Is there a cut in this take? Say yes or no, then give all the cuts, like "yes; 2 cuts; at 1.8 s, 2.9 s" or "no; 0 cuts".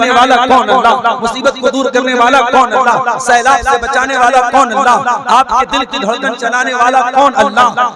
no; 0 cuts